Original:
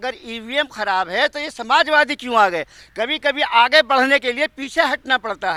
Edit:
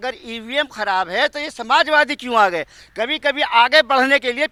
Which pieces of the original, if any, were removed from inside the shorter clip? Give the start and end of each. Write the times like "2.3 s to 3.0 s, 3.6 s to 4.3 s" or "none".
none